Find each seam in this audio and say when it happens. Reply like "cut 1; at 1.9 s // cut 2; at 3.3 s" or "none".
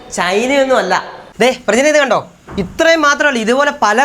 cut 1; at 1.2 s